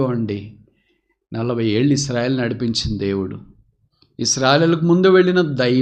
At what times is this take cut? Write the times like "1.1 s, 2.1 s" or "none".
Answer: none